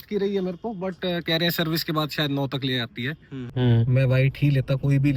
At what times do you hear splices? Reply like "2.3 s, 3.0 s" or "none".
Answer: 3.5 s